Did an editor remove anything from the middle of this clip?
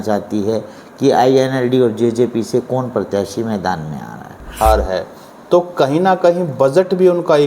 yes; 1 cut; at 4.6 s

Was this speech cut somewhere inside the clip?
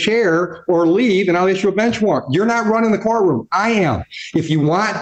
no; 0 cuts

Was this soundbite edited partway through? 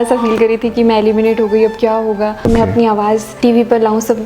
yes; 2 cuts; at 2.4 s, 3.3 s

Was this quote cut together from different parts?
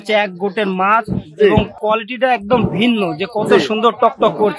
no; 0 cuts

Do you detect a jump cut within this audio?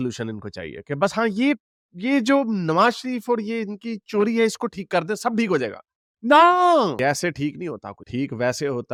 no; 0 cuts

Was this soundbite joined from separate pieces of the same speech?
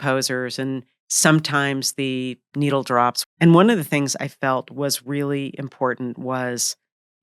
yes; 1 cut; at 3.2 s

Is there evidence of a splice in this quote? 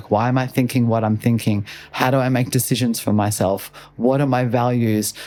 no; 0 cuts

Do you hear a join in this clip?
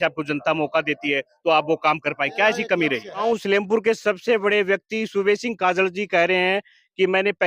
yes; 1 cut; at 3.2 s

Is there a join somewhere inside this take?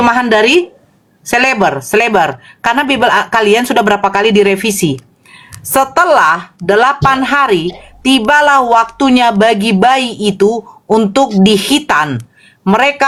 no; 0 cuts

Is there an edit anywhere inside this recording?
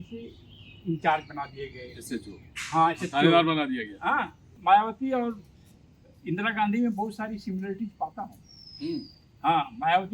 yes; 1 cut; at 4.5 s

